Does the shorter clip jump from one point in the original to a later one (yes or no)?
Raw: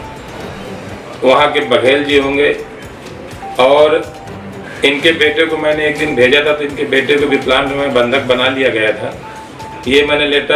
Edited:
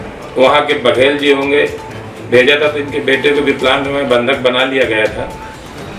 yes